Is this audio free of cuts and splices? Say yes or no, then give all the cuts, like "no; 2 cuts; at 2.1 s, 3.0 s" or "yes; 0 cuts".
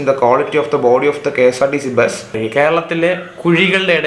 no; 1 cut; at 2.3 s